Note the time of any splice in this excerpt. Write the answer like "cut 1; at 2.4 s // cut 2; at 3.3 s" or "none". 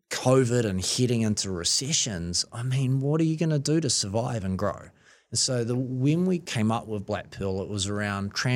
cut 1; at 6.5 s